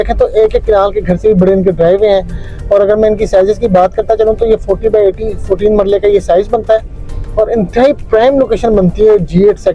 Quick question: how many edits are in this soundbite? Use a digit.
0